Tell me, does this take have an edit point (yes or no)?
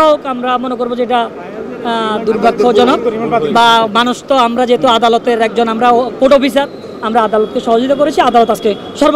no